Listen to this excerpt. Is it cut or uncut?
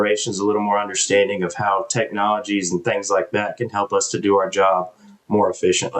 uncut